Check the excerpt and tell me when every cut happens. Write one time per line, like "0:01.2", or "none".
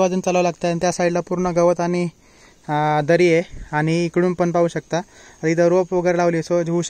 none